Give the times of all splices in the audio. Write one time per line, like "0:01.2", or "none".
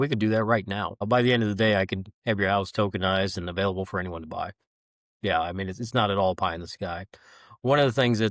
0:01.0